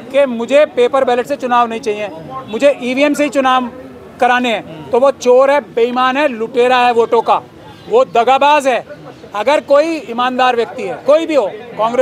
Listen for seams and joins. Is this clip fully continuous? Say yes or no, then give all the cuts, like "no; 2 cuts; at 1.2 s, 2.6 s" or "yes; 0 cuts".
yes; 0 cuts